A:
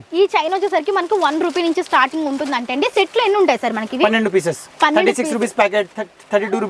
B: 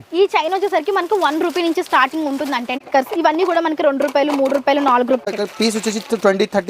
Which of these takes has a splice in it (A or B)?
B